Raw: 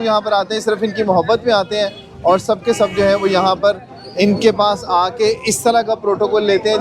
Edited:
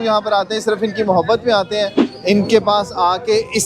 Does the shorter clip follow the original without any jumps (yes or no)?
no